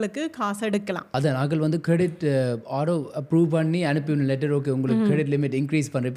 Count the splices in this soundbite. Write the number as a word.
one